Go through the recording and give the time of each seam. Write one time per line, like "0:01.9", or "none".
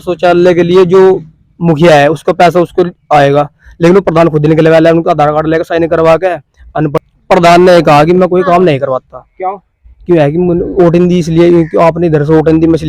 0:07.0